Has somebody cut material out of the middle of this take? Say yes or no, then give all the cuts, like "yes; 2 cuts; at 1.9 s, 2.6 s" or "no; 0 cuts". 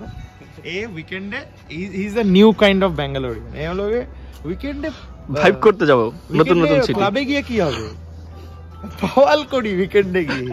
no; 0 cuts